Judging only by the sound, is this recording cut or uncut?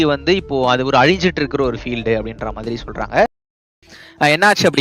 cut